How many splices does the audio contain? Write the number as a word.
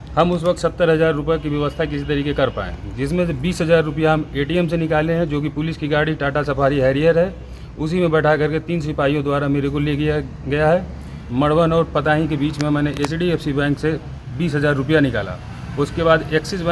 zero